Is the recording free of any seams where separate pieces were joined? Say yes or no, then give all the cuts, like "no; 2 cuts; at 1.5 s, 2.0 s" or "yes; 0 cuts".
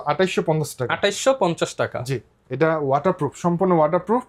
yes; 0 cuts